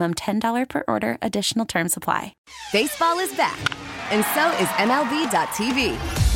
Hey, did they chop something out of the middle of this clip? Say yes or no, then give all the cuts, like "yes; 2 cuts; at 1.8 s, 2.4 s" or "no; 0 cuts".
yes; 1 cut; at 2.4 s